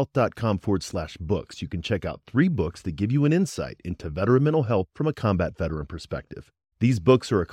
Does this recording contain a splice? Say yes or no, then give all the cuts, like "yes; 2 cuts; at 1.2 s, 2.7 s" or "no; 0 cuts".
no; 0 cuts